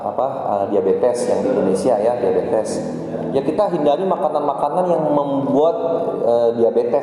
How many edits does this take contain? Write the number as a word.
zero